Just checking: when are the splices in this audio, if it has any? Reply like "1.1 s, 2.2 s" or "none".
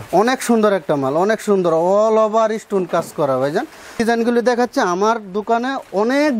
4.0 s